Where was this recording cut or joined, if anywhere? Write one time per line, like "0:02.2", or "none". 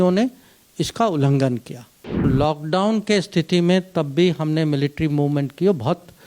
0:02.3